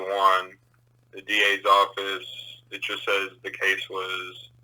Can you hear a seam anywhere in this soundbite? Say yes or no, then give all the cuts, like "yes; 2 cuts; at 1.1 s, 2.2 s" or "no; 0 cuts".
no; 0 cuts